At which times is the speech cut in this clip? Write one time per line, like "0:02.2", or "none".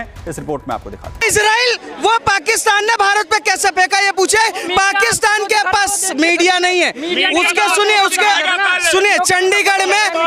0:01.2